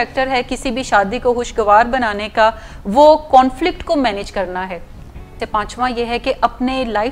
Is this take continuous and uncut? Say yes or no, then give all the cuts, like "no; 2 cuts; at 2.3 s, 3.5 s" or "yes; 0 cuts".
no; 1 cut; at 5.4 s